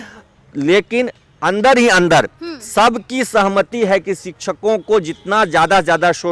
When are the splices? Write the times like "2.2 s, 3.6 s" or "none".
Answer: none